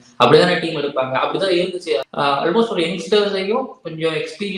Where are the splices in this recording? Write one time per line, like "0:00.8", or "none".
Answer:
0:02.0